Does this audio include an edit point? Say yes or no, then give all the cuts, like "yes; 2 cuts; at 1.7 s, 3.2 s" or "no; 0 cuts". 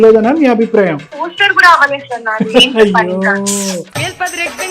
yes; 2 cuts; at 1.1 s, 3.9 s